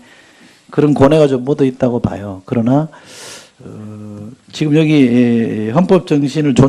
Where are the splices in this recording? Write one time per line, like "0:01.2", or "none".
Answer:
0:05.4